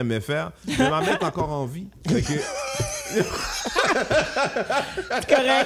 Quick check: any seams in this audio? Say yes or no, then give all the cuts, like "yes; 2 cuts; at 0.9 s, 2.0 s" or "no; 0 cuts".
no; 0 cuts